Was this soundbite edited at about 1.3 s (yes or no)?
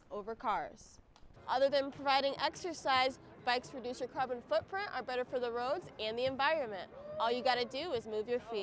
yes